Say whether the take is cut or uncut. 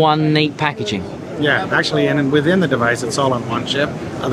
uncut